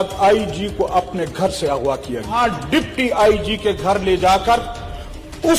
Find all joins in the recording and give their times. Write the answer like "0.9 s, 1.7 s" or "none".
2.4 s